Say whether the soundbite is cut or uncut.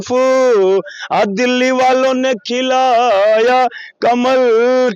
uncut